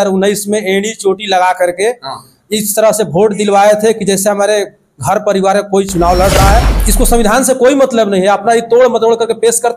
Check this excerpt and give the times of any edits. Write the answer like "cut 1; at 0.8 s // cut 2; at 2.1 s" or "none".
cut 1; at 6.8 s